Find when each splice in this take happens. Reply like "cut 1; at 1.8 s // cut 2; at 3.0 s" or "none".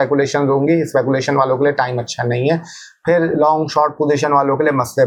none